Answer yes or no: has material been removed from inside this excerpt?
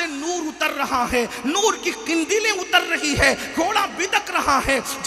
no